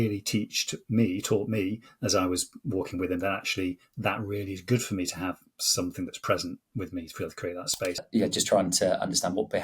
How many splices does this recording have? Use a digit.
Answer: 1